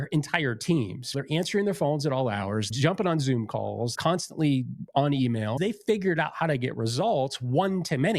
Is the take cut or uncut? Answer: cut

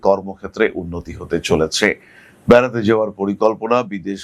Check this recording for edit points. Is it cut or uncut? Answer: uncut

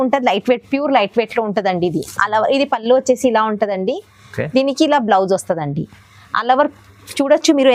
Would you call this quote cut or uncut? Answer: uncut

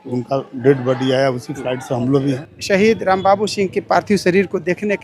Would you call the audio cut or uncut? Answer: cut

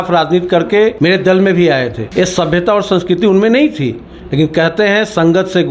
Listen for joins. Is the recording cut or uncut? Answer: cut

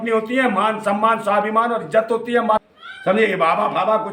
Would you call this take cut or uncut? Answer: cut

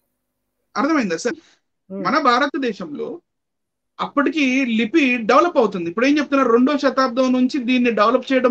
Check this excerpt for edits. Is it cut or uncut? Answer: cut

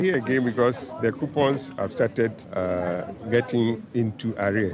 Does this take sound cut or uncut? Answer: cut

